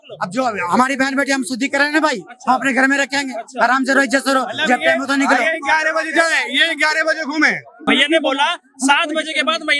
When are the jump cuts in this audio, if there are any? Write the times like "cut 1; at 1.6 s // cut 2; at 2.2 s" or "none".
cut 1; at 7.9 s